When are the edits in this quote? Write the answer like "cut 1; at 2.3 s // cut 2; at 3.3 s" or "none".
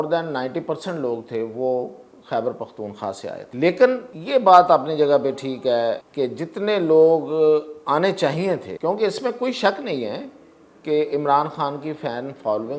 cut 1; at 3.4 s // cut 2; at 4.1 s // cut 3; at 6.1 s // cut 4; at 8.7 s